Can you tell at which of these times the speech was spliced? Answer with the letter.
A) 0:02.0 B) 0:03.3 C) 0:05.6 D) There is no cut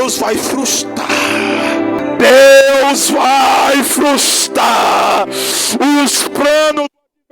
A